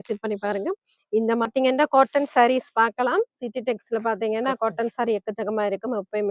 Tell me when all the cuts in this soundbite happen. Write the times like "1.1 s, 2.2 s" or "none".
1.5 s